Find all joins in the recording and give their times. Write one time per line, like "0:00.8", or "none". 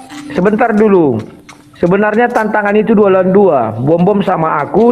none